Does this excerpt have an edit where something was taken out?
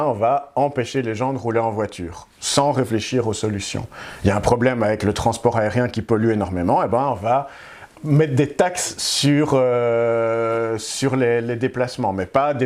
no; 0 cuts

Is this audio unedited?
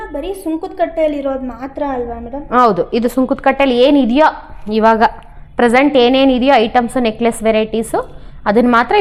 yes; 0 cuts

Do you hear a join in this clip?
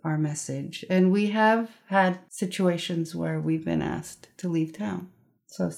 yes; 1 cut; at 2.3 s

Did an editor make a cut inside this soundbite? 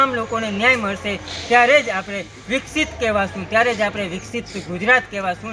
no; 0 cuts

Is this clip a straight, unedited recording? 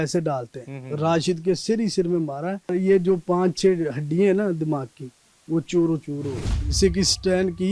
no; 2 cuts; at 2.7 s, 6.6 s

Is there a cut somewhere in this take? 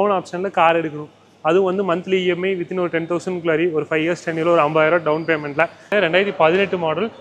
yes; 1 cut; at 5.9 s

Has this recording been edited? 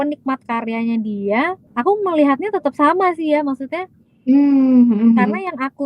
yes; 1 cut; at 1.6 s

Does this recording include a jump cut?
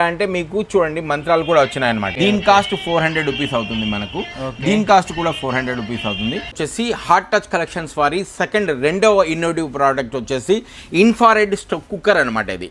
yes; 2 cuts; at 2.1 s, 6.5 s

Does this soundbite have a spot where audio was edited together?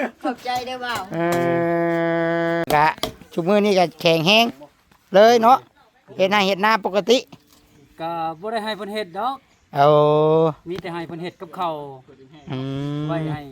yes; 1 cut; at 2.7 s

